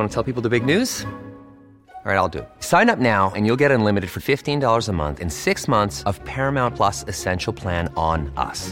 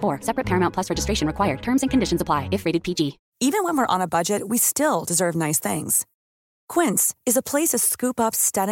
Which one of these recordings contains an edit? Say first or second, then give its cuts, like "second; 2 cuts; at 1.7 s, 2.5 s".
second; 1 cut; at 3.2 s